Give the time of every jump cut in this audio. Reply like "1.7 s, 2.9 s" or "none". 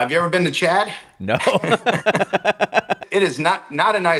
none